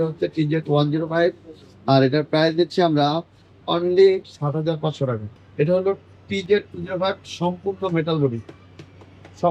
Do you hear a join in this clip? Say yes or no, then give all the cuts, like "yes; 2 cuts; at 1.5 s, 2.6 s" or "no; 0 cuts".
yes; 1 cut; at 5.3 s